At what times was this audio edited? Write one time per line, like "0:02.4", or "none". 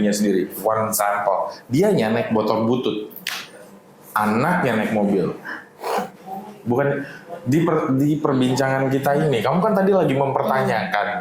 0:06.0